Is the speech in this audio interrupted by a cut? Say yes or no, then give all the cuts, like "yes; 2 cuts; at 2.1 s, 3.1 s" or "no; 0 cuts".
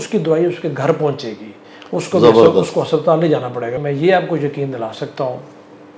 yes; 1 cut; at 3.8 s